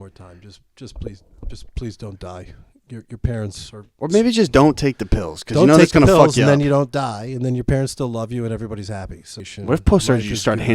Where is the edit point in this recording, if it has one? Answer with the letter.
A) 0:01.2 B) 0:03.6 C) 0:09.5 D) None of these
C